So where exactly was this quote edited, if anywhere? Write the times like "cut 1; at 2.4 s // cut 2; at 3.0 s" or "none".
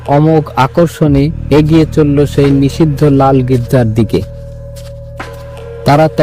none